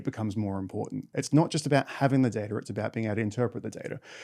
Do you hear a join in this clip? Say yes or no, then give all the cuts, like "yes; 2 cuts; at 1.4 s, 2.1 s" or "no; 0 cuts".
yes; 1 cut; at 1.0 s